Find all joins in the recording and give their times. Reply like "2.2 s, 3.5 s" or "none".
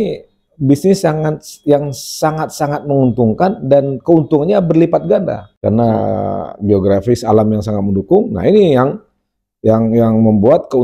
5.5 s

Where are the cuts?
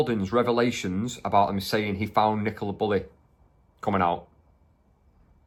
none

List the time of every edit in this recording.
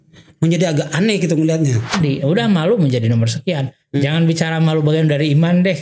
1.9 s

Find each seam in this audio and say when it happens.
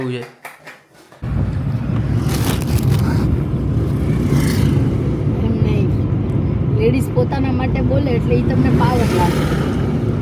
1.2 s

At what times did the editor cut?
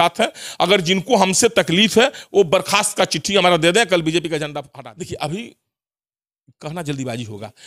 4.6 s

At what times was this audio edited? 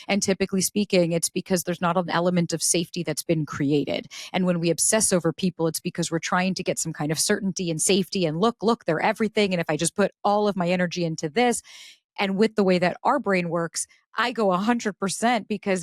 none

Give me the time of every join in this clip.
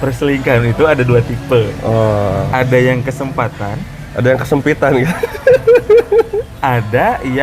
none

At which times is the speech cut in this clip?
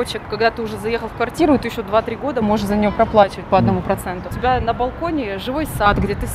4.3 s

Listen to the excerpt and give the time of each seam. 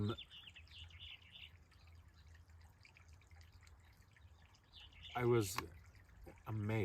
4.7 s

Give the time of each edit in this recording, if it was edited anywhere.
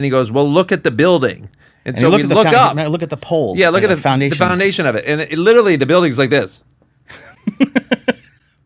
none

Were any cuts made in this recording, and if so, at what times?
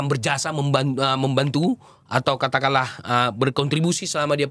none

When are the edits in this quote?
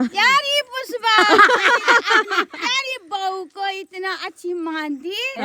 none

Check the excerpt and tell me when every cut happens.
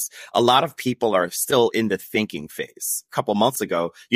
3.1 s

